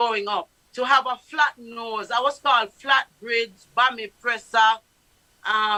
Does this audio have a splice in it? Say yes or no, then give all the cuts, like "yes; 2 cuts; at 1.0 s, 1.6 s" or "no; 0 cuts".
no; 0 cuts